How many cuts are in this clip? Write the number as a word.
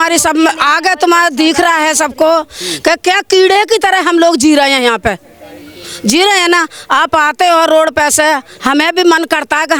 zero